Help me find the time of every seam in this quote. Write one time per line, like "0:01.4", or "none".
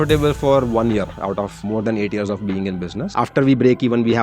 0:01.6
0:03.0